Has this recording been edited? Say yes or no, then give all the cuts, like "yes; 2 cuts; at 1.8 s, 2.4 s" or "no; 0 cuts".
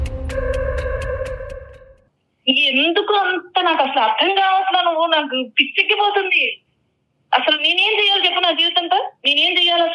no; 0 cuts